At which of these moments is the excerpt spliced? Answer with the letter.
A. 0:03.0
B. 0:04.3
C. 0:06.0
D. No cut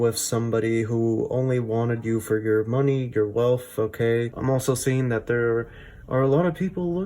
B